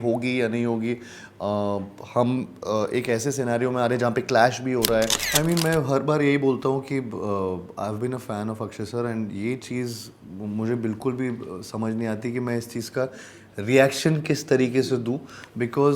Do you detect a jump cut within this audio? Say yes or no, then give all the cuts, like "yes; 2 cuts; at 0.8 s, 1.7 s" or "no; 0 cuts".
yes; 1 cut; at 5.2 s